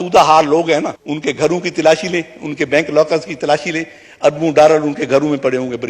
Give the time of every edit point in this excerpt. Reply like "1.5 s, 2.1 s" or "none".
1.0 s